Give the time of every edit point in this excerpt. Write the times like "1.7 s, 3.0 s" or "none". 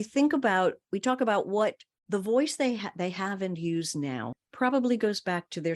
1.9 s, 4.4 s